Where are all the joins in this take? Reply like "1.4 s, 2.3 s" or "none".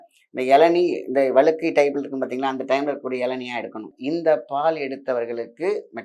3.9 s

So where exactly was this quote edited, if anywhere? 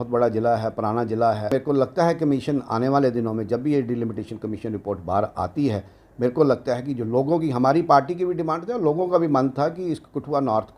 1.5 s

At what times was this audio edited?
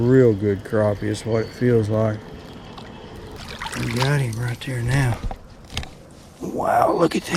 3.4 s

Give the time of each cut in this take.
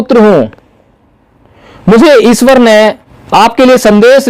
3.1 s

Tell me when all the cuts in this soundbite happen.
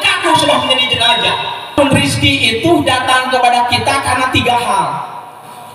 1.7 s

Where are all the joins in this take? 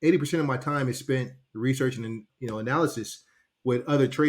2.3 s

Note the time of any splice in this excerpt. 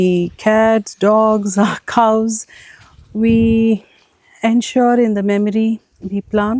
none

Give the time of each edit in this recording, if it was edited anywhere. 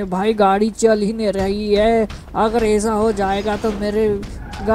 none

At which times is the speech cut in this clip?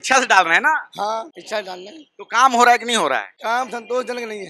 1.3 s, 3.3 s

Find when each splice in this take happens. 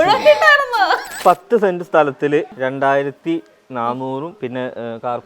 1.1 s, 2.5 s, 4.3 s

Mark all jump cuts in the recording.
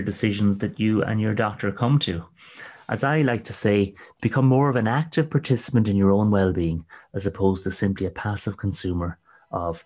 none

